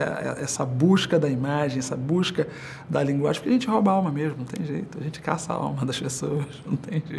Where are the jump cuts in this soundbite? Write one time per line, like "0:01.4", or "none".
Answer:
none